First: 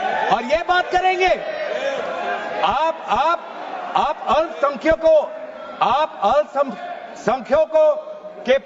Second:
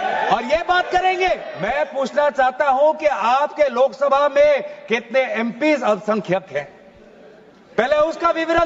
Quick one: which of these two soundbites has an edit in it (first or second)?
second